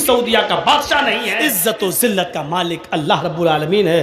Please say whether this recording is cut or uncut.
cut